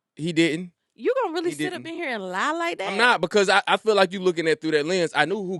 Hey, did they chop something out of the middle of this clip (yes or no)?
no